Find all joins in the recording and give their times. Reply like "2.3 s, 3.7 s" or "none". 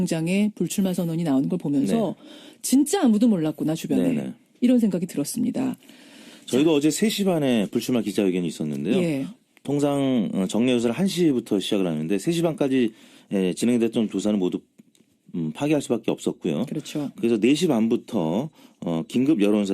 1.7 s

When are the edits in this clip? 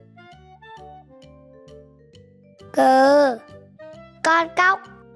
2.7 s

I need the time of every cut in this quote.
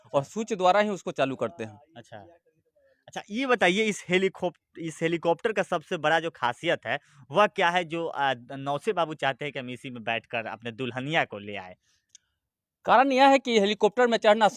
none

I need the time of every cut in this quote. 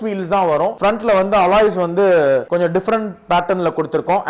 0.8 s, 2.5 s

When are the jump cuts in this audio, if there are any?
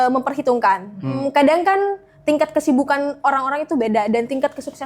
1.2 s

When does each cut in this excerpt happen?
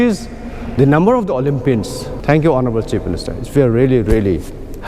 2.0 s

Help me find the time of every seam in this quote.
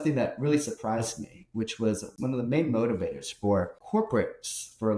2.1 s, 3.8 s

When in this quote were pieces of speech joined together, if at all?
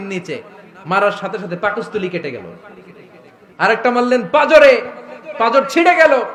none

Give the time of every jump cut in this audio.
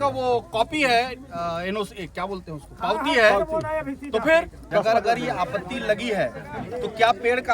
4.6 s

